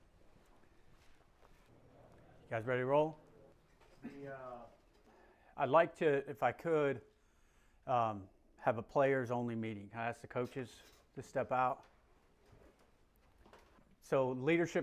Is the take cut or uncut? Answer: cut